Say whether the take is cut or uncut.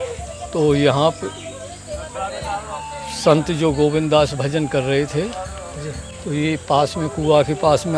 uncut